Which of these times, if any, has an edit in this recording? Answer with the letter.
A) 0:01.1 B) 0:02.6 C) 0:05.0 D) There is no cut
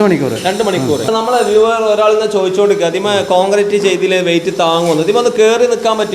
A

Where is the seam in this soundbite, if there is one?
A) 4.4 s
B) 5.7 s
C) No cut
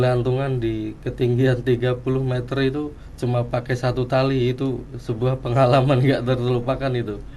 C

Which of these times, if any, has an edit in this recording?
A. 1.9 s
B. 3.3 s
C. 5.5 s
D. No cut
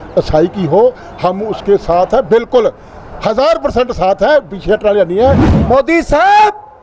C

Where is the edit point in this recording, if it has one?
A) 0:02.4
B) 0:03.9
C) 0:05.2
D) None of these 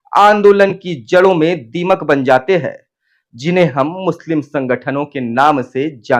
D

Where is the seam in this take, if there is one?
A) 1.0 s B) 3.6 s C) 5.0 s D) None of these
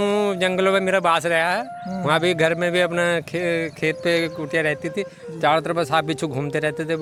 D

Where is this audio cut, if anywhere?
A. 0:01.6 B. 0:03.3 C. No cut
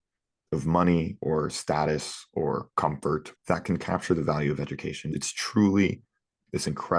B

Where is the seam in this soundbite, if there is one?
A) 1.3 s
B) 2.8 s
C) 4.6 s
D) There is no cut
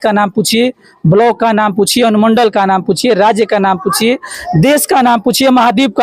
D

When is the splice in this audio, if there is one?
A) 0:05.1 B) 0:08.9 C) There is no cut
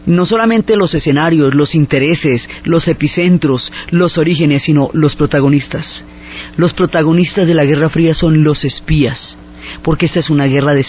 B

